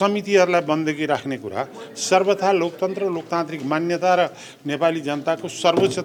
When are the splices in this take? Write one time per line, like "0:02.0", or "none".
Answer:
none